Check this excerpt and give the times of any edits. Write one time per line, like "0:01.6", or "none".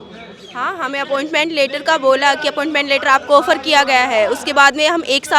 none